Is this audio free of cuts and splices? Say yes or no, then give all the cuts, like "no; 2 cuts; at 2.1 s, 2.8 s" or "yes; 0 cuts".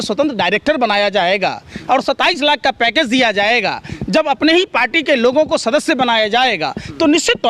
yes; 0 cuts